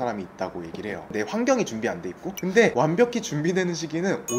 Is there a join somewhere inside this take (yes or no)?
yes